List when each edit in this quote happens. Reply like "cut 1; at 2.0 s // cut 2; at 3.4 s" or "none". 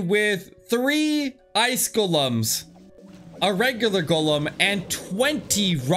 none